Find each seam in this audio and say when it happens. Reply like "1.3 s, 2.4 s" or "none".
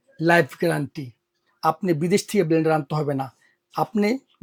none